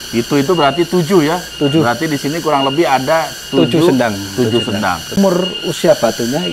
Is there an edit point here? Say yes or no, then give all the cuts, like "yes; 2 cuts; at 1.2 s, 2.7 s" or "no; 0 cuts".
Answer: yes; 1 cut; at 5.2 s